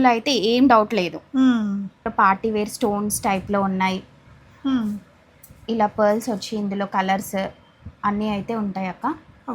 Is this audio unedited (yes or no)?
no